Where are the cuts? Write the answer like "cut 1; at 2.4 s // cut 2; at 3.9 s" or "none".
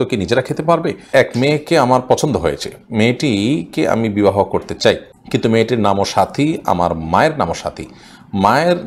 cut 1; at 1.1 s // cut 2; at 5.1 s